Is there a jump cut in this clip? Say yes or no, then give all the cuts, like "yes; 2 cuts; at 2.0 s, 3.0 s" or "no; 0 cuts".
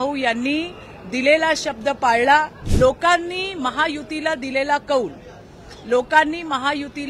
yes; 1 cut; at 2.6 s